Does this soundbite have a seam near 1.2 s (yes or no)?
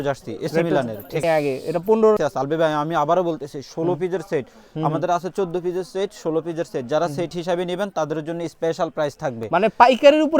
yes